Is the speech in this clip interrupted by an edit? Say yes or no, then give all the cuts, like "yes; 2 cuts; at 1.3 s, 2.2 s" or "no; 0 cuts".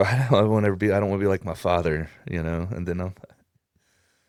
no; 0 cuts